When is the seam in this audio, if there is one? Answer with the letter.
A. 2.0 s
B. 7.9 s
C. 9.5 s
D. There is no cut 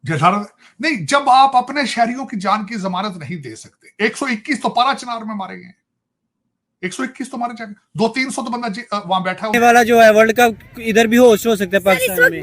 C